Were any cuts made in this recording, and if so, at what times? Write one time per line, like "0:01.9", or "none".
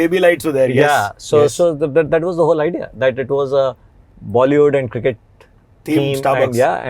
none